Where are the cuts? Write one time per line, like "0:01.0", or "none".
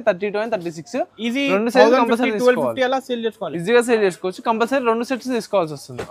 none